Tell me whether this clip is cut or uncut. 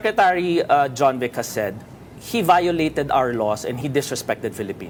uncut